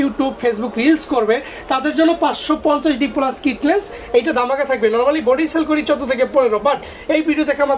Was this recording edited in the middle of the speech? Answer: no; 0 cuts

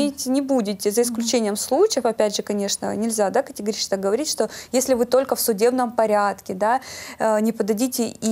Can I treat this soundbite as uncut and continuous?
yes; 0 cuts

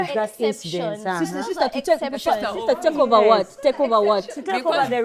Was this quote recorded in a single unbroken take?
yes; 0 cuts

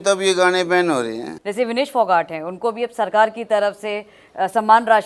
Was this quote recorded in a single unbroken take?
no; 1 cut; at 1.3 s

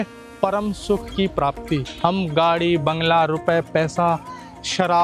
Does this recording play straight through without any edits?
no; 1 cut; at 1.9 s

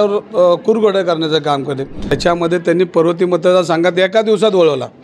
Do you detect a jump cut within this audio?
yes; 1 cut; at 2.1 s

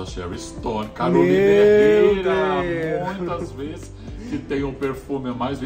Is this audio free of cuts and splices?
yes; 0 cuts

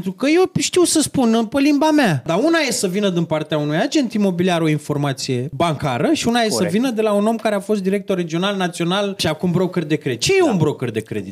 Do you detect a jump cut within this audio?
yes; 3 cuts; at 2.2 s, 5.5 s, 9.2 s

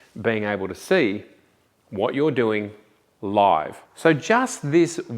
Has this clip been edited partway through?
yes; 1 cut; at 3.8 s

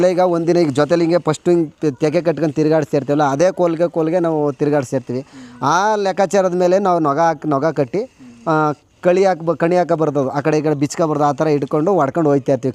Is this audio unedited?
yes; 0 cuts

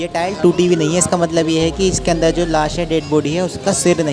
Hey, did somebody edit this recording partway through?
no; 0 cuts

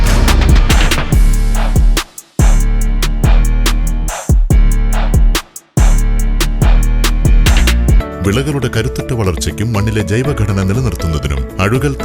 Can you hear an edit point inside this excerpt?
yes; 1 cut; at 8.1 s

